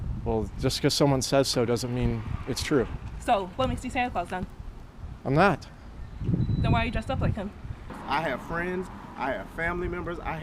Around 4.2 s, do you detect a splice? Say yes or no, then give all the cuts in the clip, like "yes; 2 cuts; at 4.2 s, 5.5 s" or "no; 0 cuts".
no; 1 cut; at 7.9 s